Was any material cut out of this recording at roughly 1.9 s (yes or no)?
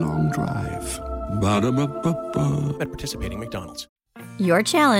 no